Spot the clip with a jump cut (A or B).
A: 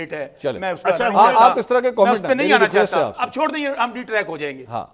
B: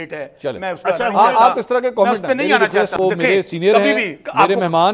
B